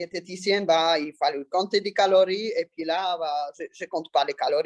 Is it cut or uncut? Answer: uncut